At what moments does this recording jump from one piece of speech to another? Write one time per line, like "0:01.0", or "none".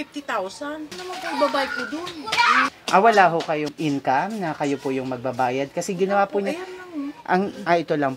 0:01.0
0:02.7
0:03.7